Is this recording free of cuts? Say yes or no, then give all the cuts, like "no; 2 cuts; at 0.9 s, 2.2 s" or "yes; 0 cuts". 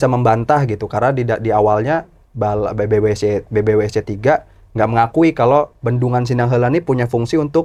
yes; 0 cuts